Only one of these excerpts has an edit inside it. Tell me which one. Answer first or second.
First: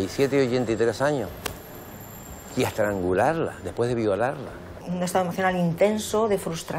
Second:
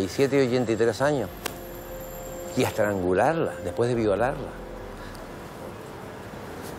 first